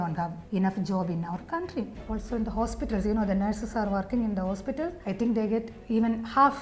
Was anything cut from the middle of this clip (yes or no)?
yes